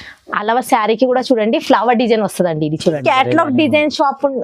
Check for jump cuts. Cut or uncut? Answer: cut